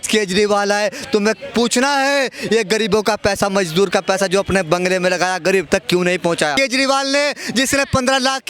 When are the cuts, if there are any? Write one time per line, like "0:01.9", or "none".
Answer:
0:06.5